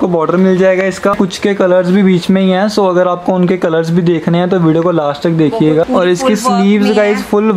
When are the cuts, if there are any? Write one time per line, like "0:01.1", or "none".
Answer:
0:01.1
0:05.9